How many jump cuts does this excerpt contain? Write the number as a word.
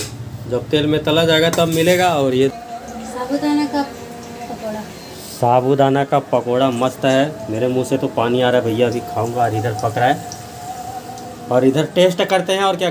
one